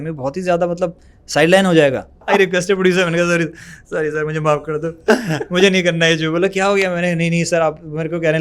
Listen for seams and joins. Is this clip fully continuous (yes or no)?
no